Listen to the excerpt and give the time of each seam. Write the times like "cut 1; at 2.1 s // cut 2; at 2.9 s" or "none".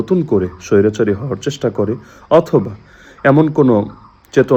none